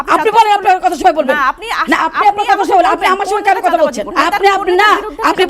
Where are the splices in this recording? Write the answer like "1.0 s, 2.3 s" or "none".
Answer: 4.1 s